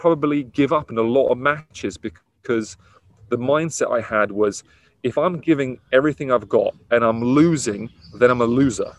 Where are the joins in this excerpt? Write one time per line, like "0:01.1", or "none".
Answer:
none